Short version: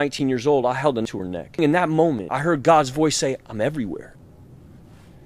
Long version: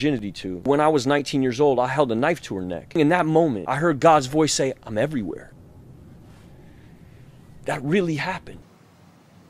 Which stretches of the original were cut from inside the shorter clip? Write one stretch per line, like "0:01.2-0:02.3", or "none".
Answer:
0:02.2-0:02.4